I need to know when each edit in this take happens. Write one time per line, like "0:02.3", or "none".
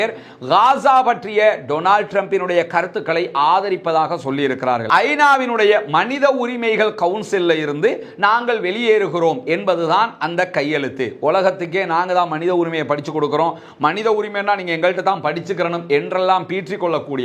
0:04.8